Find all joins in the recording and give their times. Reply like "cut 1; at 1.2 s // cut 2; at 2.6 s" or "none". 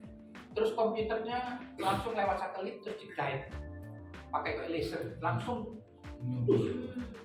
none